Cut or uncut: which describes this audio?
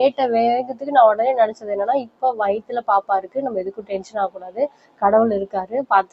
uncut